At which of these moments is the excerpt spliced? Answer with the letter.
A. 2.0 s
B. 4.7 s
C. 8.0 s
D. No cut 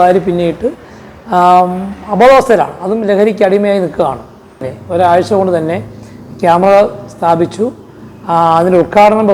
B